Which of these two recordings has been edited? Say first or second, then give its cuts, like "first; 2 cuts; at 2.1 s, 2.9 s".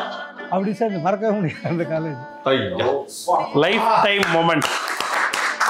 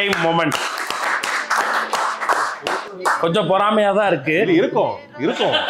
first; 1 cut; at 2.3 s